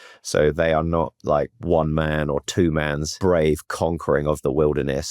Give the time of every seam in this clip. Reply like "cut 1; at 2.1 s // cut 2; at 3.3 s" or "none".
cut 1; at 1.6 s // cut 2; at 3.1 s